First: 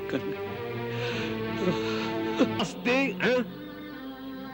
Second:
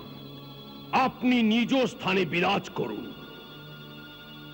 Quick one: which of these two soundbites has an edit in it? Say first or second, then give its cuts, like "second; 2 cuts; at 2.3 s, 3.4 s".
first; 1 cut; at 2.6 s